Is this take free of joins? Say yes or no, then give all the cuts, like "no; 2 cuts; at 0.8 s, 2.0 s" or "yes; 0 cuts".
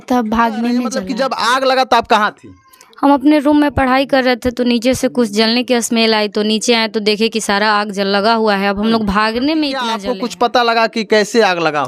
no; 2 cuts; at 1.0 s, 10.0 s